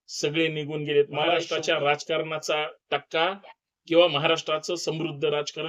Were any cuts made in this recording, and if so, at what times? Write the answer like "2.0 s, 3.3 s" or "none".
1.5 s